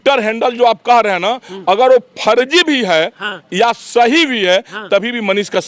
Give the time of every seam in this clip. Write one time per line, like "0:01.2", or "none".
none